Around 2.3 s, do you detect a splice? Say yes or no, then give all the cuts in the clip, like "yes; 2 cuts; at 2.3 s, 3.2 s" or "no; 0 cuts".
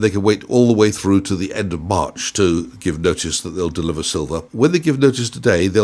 no; 1 cut; at 4.5 s